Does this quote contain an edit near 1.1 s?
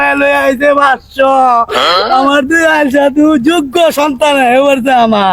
no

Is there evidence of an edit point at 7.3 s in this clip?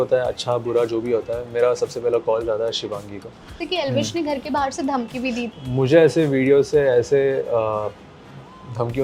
no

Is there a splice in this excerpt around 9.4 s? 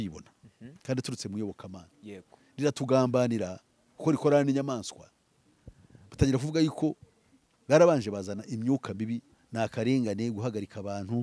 yes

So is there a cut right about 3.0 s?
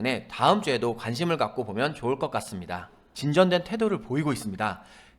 yes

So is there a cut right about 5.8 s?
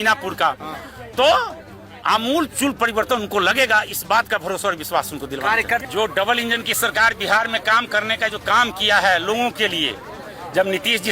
yes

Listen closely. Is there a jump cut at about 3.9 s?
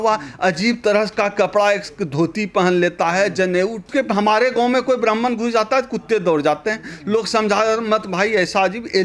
yes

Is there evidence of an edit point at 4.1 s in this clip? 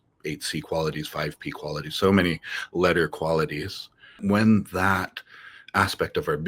yes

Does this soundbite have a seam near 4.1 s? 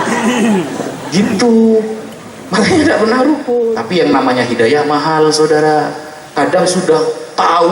yes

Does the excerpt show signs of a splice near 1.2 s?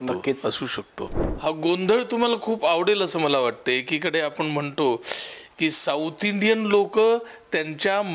yes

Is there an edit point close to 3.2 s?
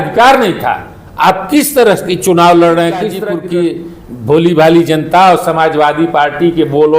yes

